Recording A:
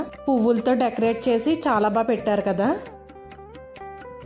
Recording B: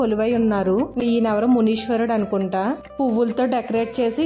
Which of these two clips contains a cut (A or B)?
B